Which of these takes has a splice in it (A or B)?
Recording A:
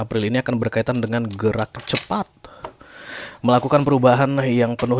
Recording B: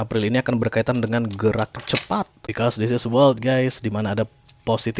B